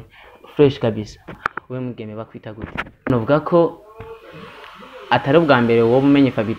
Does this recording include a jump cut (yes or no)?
yes